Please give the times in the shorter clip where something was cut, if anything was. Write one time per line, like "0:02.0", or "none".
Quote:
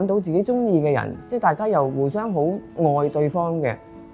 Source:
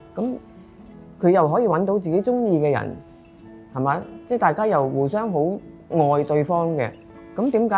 0:01.2
0:02.7

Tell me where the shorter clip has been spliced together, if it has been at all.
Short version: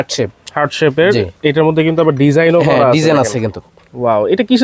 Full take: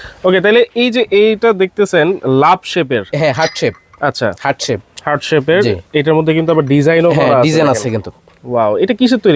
none

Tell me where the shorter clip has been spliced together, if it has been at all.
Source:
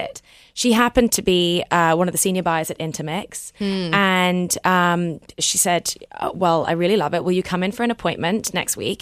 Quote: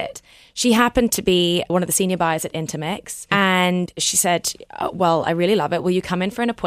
0:01.7
0:03.2
0:03.9

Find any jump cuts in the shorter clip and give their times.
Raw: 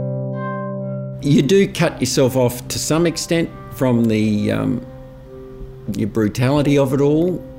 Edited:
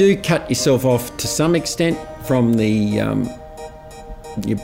none

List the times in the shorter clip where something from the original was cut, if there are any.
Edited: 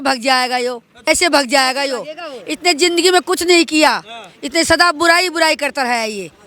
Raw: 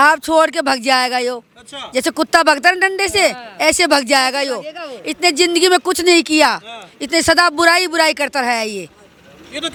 0:00.9

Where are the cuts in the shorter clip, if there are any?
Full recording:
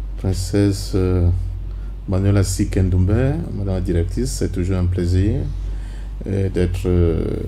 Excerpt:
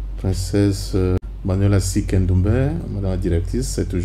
0:01.2

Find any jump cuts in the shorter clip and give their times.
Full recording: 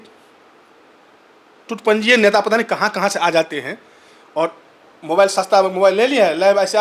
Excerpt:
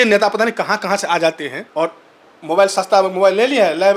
0:01.5

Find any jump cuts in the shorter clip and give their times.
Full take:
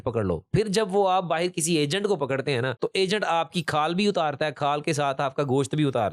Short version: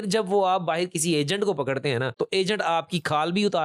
none

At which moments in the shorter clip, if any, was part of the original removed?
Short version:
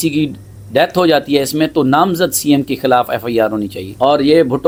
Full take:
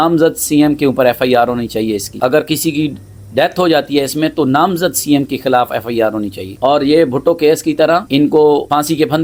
none

